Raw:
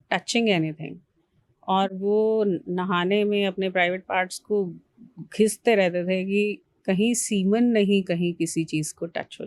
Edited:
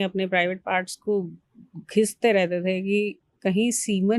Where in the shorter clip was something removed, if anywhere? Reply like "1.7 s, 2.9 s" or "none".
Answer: none